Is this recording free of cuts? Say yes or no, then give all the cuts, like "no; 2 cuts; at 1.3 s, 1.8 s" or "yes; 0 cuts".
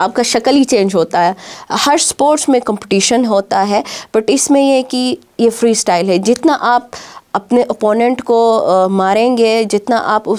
yes; 0 cuts